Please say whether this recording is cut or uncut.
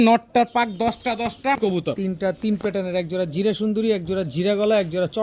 cut